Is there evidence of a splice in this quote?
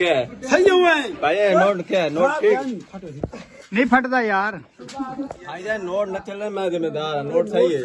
no; 0 cuts

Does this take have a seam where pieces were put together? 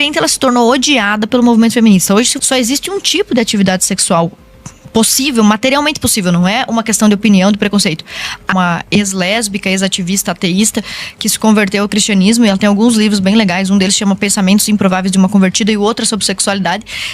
yes; 2 cuts; at 2.4 s, 8.5 s

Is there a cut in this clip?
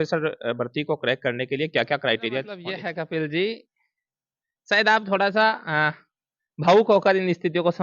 yes; 1 cut; at 2.7 s

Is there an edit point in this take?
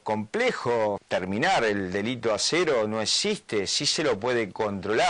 yes; 1 cut; at 1.0 s

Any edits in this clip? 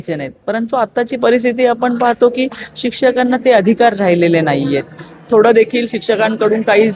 no; 0 cuts

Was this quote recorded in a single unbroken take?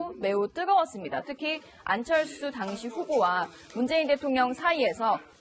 no; 1 cut; at 4.0 s

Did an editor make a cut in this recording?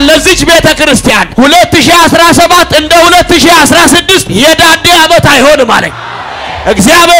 yes; 2 cuts; at 1.3 s, 4.3 s

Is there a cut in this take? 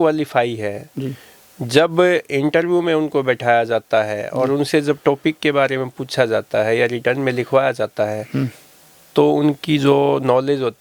no; 0 cuts

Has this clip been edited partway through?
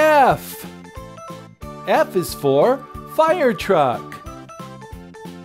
yes; 1 cut; at 4.0 s

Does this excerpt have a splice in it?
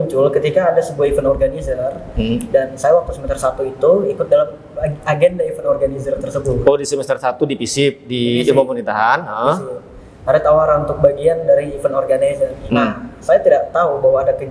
no; 0 cuts

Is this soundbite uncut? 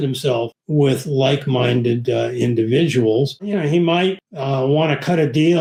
yes; 0 cuts

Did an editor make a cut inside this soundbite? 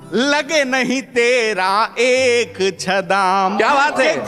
no; 0 cuts

